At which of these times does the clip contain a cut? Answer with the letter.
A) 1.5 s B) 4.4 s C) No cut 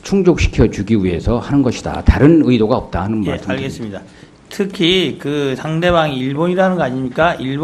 A